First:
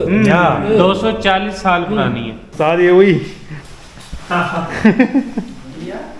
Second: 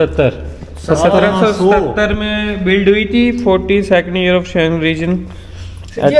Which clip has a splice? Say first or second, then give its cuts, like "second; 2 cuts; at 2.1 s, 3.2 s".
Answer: first; 1 cut; at 2.4 s